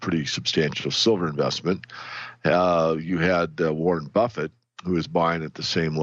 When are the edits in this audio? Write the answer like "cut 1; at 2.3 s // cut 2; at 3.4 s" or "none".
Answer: cut 1; at 0.9 s

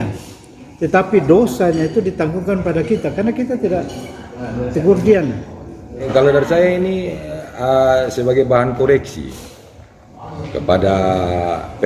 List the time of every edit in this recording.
cut 1; at 6.1 s

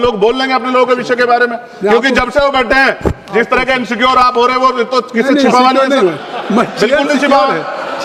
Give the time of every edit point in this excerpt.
none

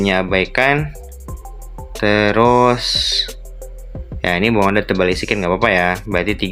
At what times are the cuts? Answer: none

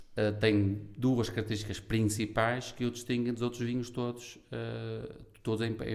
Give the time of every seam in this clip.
none

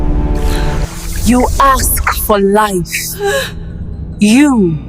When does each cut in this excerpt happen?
cut 1; at 0.9 s

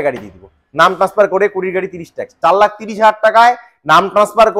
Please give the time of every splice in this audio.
cut 1; at 2.3 s

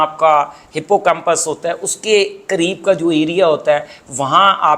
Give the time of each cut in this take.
none

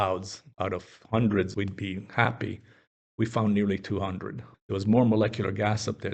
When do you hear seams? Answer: cut 1; at 1.5 s // cut 2; at 4.4 s

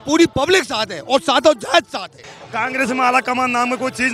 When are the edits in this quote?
cut 1; at 2.4 s

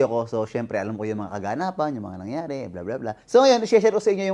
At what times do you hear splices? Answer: none

